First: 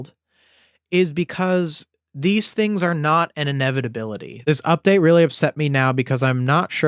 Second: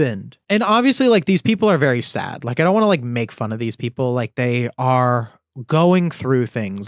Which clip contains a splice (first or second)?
first